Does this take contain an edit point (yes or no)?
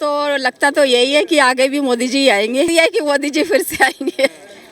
yes